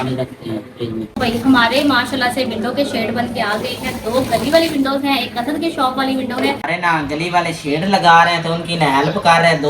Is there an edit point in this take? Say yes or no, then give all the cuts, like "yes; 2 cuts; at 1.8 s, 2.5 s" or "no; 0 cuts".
yes; 2 cuts; at 1.1 s, 6.6 s